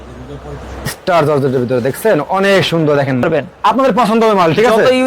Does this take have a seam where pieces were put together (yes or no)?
yes